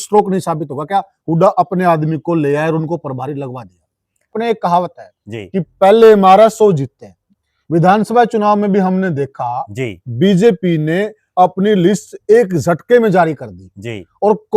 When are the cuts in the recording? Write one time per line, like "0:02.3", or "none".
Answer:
0:04.3